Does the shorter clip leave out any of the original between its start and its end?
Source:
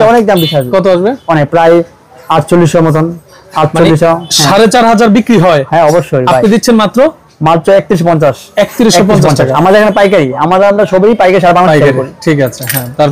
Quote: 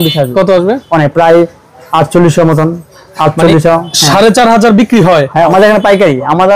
yes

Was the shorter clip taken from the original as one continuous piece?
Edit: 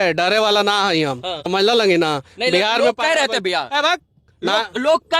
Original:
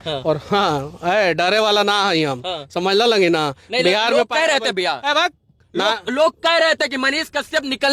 no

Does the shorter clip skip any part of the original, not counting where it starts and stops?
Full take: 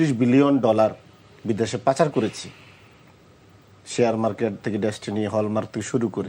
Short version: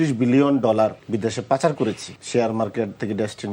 yes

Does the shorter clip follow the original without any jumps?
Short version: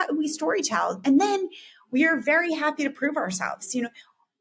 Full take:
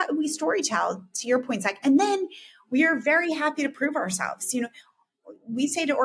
no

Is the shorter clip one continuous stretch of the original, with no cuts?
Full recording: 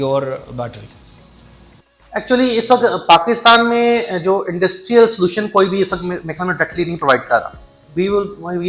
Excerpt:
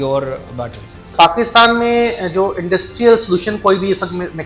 no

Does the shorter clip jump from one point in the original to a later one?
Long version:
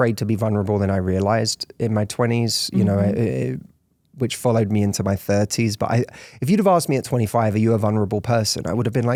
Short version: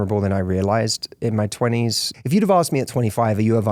yes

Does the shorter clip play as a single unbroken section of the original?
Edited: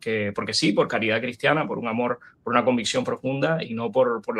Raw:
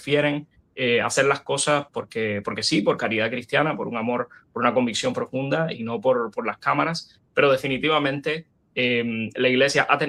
yes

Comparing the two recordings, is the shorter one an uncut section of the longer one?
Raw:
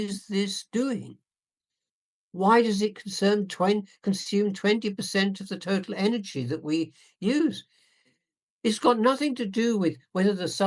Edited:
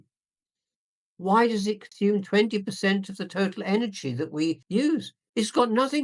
no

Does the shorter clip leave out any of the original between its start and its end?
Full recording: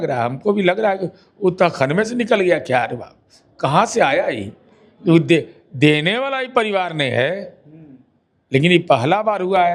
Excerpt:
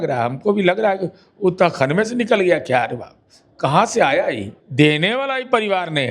yes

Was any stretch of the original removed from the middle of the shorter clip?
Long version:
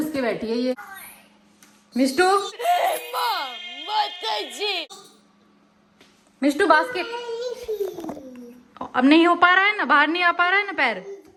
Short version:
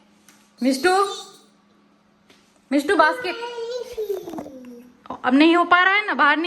yes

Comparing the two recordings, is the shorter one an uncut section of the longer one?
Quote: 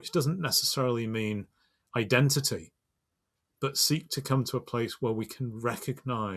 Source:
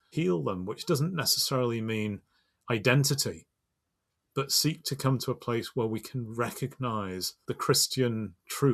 yes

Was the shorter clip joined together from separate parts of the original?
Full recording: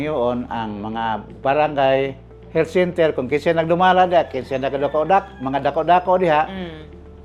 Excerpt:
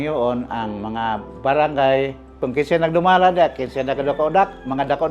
yes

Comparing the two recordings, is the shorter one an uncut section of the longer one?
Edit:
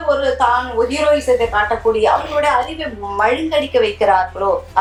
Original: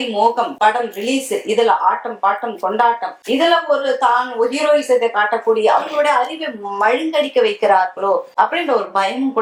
yes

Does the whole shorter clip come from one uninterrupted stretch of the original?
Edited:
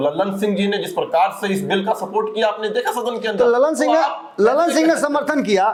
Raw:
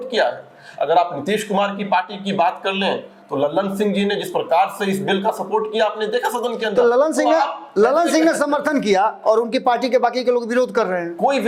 yes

